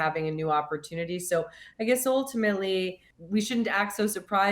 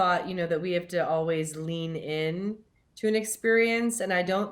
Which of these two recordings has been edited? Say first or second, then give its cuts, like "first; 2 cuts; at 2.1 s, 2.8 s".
first; 1 cut; at 3.0 s